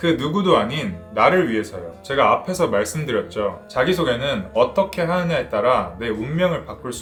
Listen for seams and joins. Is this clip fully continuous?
yes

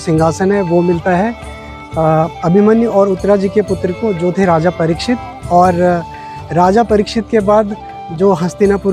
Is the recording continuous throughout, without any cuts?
yes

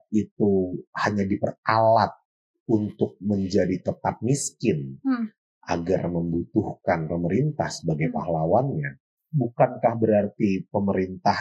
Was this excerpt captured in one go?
yes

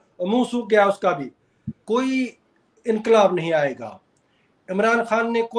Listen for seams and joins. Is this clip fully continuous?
no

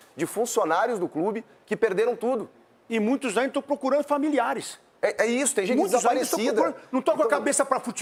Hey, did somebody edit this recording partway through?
no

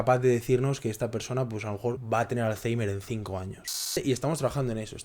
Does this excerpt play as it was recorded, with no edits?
no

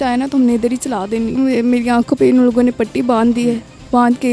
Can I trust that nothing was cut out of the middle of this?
no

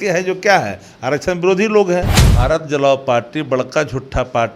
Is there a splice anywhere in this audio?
yes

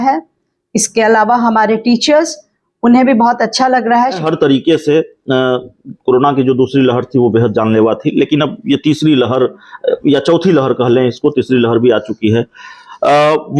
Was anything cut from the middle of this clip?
yes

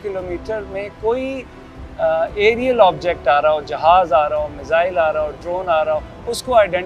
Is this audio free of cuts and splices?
yes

